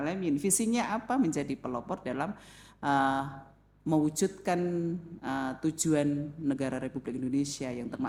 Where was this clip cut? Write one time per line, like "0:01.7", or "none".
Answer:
none